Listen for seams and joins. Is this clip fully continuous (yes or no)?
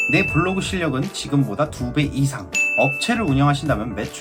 yes